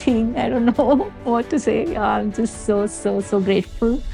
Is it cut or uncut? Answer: uncut